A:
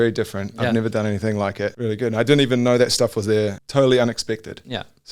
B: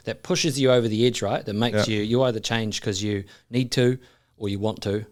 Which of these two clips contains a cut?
A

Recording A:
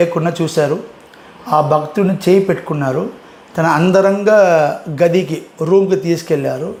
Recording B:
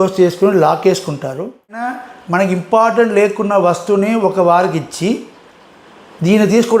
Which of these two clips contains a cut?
B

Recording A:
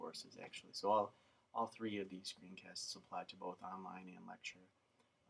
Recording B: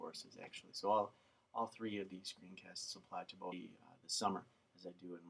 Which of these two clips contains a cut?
A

